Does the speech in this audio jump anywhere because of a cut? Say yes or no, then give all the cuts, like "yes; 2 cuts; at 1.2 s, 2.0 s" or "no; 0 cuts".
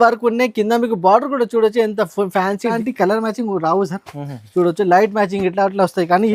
yes; 1 cut; at 2.8 s